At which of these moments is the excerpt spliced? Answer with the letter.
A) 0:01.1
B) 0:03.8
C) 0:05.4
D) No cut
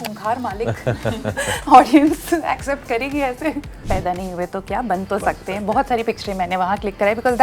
B